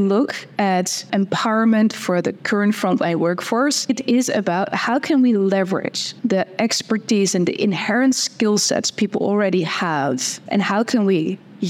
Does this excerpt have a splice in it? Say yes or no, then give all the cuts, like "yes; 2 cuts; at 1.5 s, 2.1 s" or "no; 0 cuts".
yes; 4 cuts; at 1.1 s, 3.9 s, 6.0 s, 10.3 s